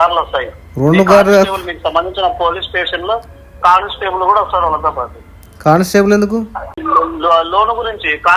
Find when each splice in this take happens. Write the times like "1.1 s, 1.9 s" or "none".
6.8 s